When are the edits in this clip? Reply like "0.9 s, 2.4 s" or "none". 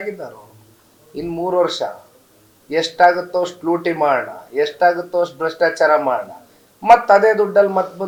none